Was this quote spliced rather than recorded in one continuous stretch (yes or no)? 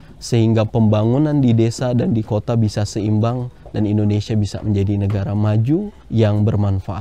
yes